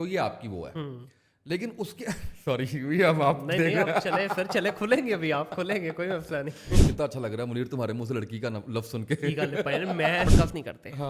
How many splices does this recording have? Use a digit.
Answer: 2